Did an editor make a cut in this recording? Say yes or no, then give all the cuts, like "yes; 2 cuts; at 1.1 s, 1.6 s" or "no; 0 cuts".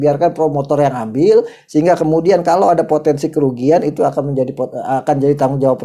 no; 0 cuts